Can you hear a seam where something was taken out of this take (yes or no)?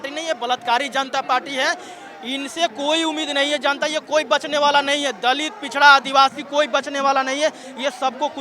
no